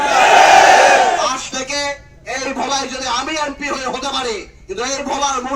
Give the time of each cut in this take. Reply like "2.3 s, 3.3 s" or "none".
none